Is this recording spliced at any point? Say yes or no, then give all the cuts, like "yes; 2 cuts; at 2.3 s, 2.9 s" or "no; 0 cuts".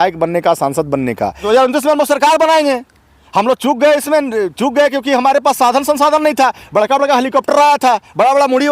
yes; 1 cut; at 1.4 s